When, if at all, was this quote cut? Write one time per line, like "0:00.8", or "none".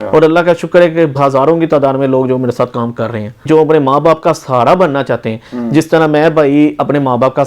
0:01.2
0:03.4